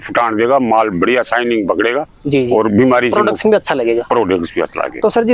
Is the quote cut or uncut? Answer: uncut